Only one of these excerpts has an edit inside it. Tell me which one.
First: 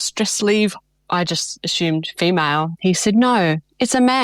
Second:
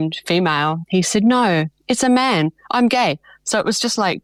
first; 1 cut; at 1.0 s

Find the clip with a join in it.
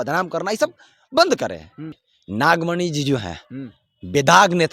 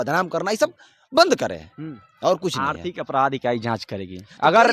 first; 1 cut; at 2.0 s

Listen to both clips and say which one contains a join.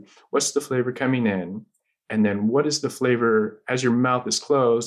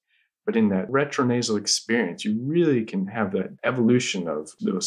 second; 1 cut; at 3.5 s

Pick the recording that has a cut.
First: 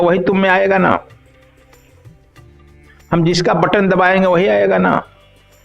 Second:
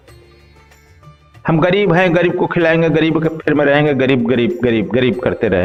first; 2 cuts; at 1.2 s, 2.6 s

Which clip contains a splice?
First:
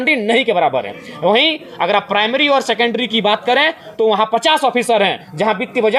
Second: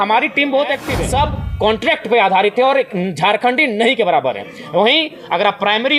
second; 1 cut; at 0.9 s

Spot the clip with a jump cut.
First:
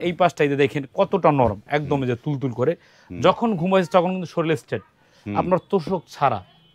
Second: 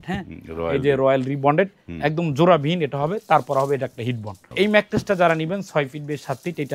second; 1 cut; at 4.4 s

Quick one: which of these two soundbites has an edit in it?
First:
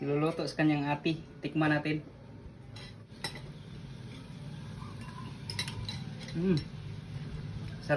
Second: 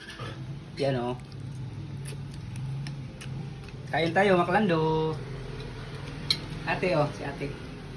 first; 1 cut; at 3.0 s

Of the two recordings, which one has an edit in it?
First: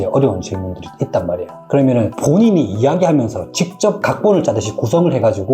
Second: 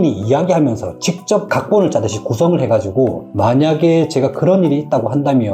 first; 1 cut; at 1.5 s

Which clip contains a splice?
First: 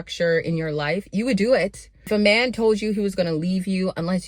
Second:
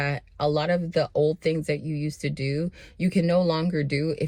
first; 1 cut; at 2.1 s

